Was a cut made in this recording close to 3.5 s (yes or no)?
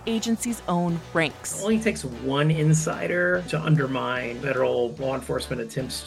yes